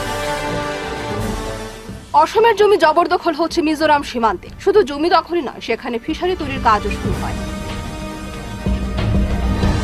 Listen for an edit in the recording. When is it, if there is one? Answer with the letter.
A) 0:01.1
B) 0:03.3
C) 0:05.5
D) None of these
A